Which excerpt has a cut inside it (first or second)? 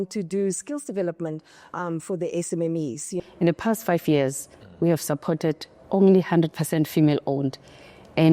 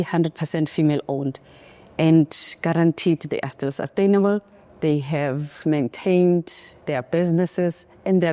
first